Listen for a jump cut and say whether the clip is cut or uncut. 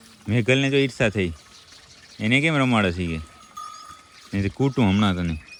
uncut